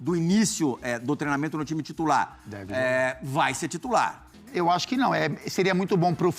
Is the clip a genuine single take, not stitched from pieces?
no; 1 cut; at 4.3 s

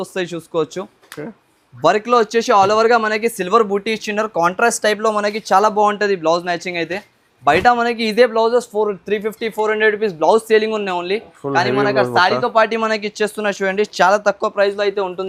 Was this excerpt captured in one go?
yes; 0 cuts

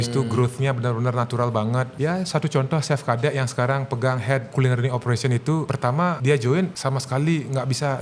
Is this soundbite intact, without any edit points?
no; 4 cuts; at 1.9 s, 4.5 s, 5.8 s, 6.8 s

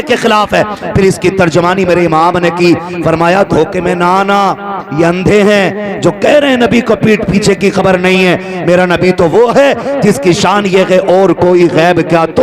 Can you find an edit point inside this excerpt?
no; 0 cuts

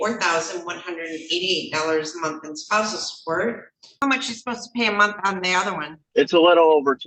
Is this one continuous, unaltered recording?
no; 2 cuts; at 3.8 s, 5.9 s

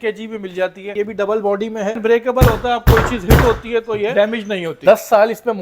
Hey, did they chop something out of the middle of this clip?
yes; 3 cuts; at 0.9 s, 2.0 s, 4.2 s

